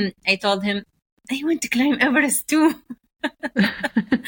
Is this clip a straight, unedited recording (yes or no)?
yes